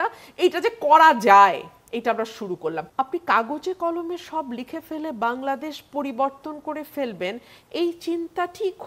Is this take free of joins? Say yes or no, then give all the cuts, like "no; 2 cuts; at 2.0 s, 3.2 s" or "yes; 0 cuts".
no; 1 cut; at 2.9 s